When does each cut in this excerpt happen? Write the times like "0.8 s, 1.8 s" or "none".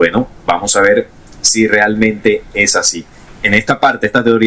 none